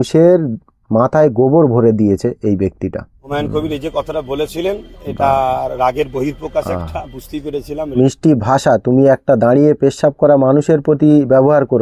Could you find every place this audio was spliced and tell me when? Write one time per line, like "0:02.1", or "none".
0:03.2
0:07.8